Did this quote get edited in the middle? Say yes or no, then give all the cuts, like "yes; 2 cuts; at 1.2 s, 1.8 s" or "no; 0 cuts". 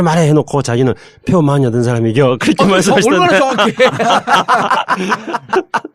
no; 0 cuts